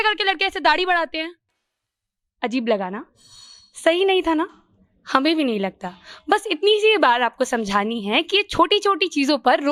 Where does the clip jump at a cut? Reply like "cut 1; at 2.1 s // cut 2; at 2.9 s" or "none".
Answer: none